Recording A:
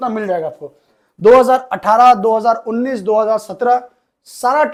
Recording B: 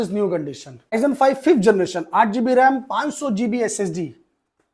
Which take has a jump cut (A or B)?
B